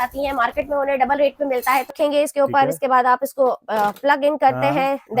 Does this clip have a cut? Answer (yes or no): yes